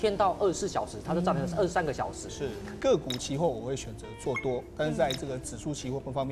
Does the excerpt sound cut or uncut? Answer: cut